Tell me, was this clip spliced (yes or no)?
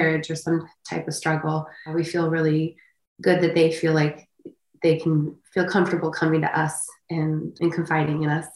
yes